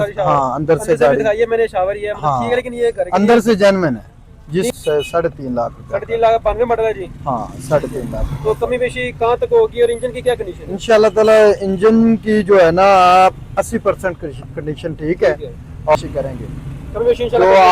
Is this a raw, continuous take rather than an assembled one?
no; 2 cuts; at 4.8 s, 15.9 s

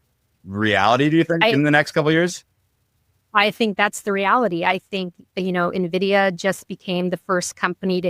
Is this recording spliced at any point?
no; 0 cuts

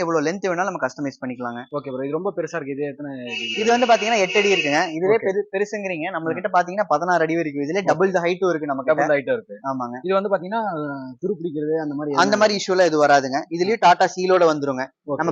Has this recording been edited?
no; 0 cuts

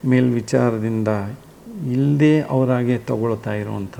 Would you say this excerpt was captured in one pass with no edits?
yes; 0 cuts

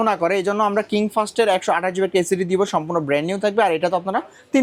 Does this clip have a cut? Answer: no; 0 cuts

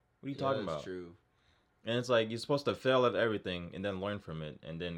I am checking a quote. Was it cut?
no; 0 cuts

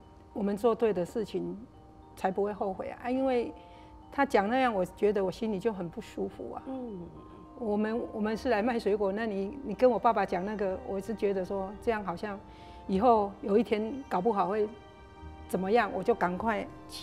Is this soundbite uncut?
yes; 0 cuts

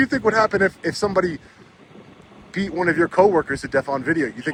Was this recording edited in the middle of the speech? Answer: no; 0 cuts

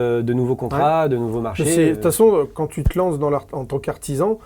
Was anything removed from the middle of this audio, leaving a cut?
no; 0 cuts

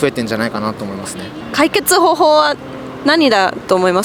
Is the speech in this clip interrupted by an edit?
yes; 1 cut; at 1.4 s

